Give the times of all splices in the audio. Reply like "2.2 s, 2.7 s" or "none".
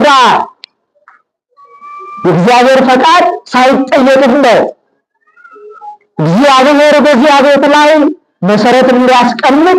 none